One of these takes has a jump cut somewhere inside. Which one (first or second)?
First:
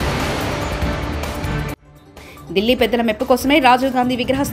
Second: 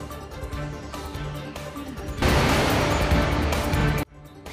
second